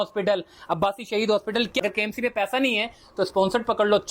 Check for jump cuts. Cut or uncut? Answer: cut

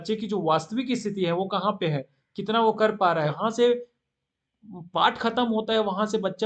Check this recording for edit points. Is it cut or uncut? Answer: uncut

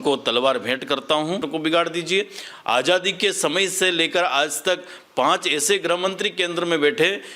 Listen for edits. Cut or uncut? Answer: cut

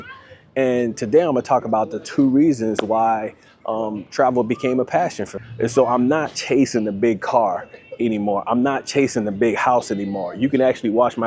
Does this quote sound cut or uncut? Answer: cut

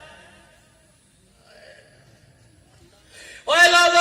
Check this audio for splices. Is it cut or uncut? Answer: cut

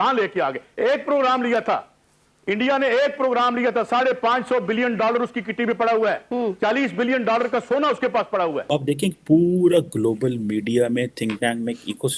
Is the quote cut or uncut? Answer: cut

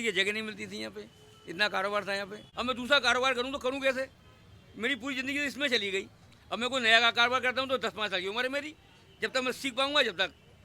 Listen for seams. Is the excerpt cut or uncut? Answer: cut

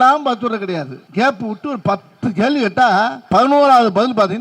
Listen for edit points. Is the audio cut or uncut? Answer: cut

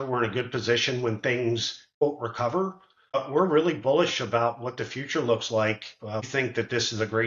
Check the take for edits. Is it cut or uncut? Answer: cut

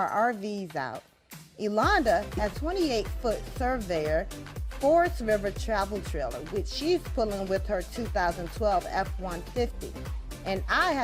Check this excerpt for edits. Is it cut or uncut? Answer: cut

